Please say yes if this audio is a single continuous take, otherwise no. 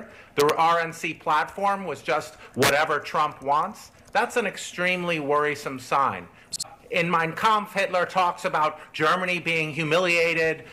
no